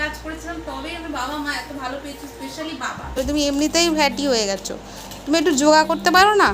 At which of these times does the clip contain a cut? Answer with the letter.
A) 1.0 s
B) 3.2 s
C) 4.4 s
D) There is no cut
B